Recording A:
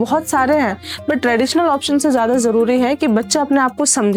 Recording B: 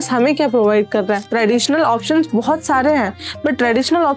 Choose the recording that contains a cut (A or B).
B